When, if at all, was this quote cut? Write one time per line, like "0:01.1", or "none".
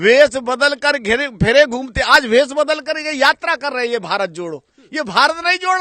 none